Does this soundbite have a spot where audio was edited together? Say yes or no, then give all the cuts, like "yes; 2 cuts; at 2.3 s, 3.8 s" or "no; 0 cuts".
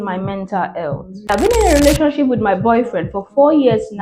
yes; 1 cut; at 1.3 s